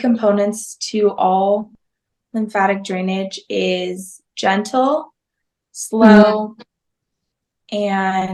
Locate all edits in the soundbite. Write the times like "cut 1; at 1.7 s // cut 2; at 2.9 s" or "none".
none